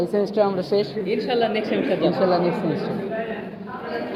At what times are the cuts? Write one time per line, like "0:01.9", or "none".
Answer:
none